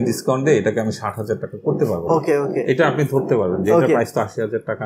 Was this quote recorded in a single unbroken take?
yes; 0 cuts

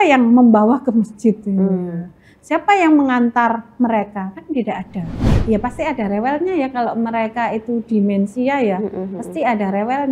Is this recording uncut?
no; 1 cut; at 5.3 s

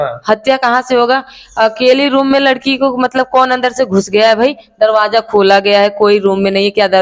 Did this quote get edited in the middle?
no; 0 cuts

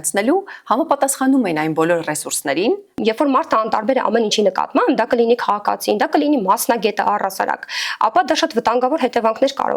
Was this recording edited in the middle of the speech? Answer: yes; 1 cut; at 3.0 s

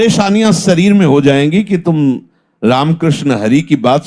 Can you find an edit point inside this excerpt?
no; 0 cuts

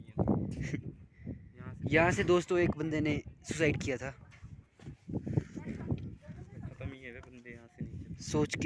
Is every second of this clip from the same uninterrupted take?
yes; 0 cuts

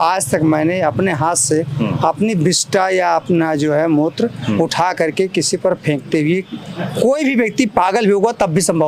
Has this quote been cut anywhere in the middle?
no; 0 cuts

